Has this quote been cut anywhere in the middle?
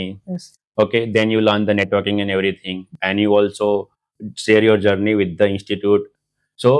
no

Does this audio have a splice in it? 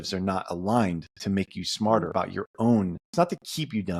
yes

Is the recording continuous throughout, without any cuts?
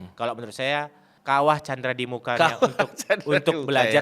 no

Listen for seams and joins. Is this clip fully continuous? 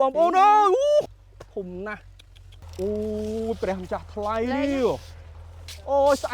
no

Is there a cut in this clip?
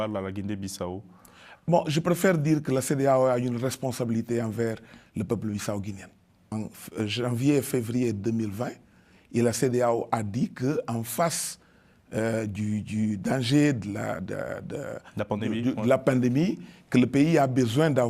yes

